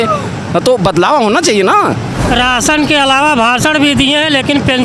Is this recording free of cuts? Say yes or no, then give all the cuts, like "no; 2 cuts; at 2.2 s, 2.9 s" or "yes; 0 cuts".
no; 1 cut; at 2.3 s